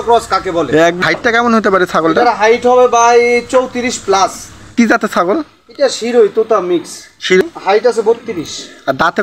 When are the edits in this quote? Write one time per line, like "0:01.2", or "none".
0:01.0
0:04.7
0:07.4